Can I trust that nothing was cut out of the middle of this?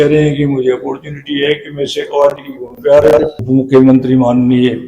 no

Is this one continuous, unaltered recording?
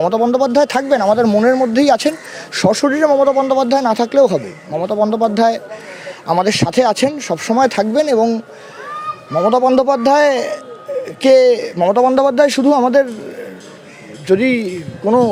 yes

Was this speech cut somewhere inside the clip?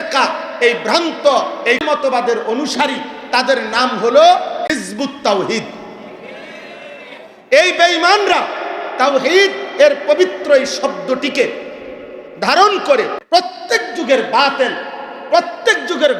yes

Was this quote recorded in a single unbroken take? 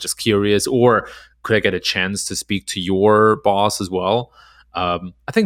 yes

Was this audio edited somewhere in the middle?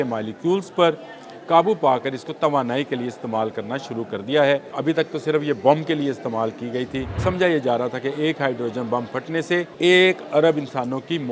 yes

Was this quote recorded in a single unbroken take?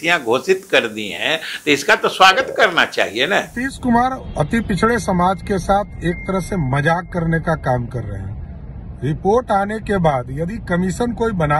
no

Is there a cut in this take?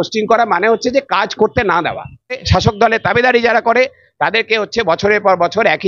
yes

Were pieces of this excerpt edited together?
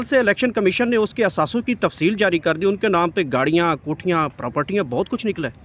no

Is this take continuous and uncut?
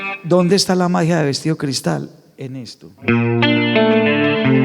yes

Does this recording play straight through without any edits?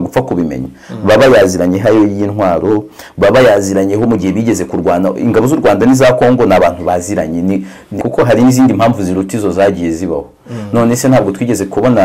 no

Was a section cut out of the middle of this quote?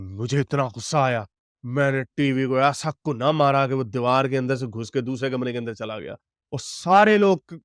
no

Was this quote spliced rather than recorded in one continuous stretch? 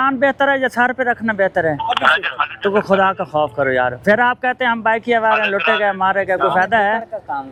no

